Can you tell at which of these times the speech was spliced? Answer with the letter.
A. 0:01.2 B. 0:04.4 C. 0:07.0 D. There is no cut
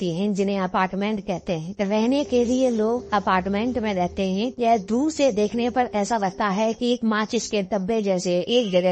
D